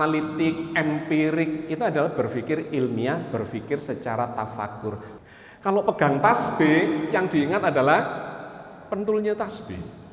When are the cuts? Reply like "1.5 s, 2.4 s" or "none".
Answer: 5.1 s